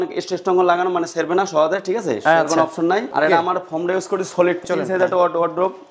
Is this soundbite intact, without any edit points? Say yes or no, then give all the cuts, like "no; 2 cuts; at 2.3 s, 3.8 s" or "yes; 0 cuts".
no; 2 cuts; at 3.1 s, 4.6 s